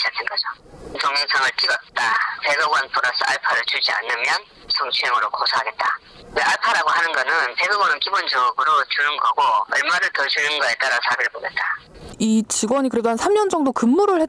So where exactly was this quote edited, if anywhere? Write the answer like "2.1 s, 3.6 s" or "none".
7.3 s